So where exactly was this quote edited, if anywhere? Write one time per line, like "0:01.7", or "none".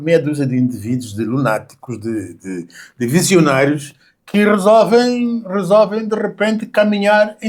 none